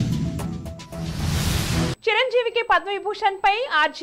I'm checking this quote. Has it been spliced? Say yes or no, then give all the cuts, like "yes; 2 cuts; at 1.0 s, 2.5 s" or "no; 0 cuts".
yes; 1 cut; at 2.0 s